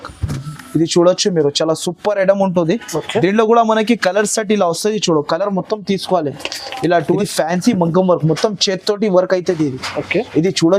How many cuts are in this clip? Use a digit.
1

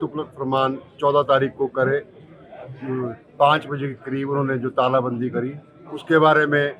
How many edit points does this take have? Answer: 0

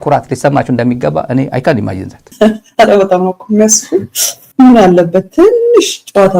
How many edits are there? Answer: 1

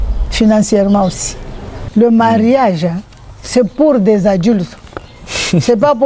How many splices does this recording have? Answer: 1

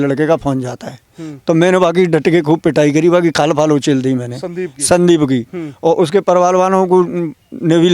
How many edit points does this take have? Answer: 0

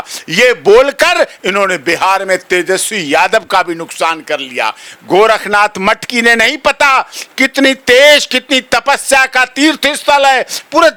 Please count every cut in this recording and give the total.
0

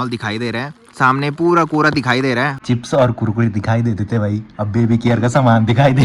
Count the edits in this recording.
1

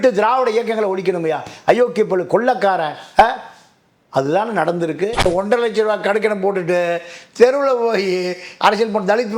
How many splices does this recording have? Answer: 1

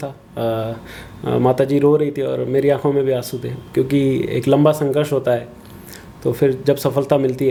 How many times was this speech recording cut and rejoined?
0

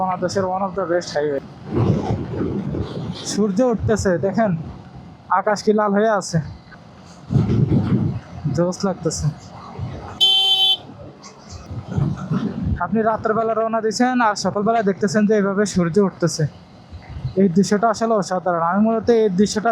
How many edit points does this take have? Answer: 0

